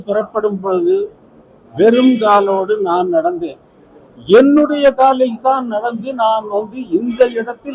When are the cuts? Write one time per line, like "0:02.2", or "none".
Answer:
none